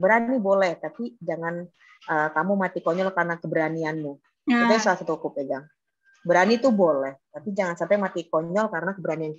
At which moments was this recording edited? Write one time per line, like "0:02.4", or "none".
none